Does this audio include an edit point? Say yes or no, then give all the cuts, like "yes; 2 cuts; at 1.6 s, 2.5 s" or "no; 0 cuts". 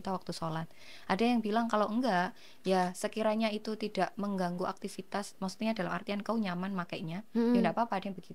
no; 0 cuts